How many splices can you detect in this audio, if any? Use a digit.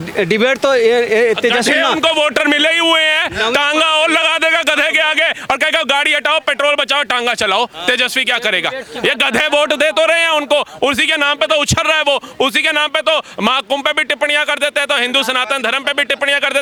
0